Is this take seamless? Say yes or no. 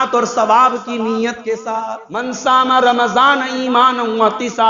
no